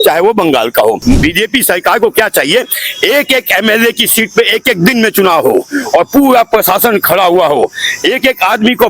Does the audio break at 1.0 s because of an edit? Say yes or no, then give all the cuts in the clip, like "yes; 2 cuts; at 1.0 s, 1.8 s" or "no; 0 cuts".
yes; 1 cut; at 1.0 s